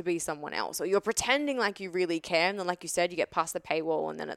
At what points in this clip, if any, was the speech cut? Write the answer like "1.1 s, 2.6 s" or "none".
none